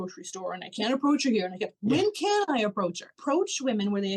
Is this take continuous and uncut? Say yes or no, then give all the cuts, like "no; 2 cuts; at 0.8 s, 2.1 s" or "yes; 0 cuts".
no; 1 cut; at 3.1 s